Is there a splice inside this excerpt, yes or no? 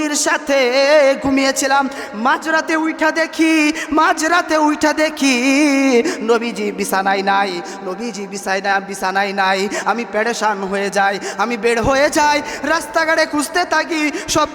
no